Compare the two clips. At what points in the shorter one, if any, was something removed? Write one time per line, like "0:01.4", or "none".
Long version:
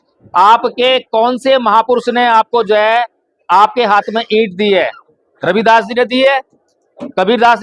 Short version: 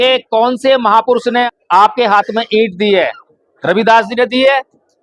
0:01.5